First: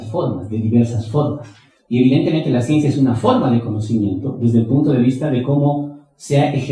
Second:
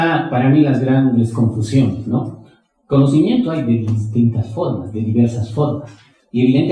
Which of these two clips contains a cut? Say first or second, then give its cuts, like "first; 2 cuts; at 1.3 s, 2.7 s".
first; 1 cut; at 4.3 s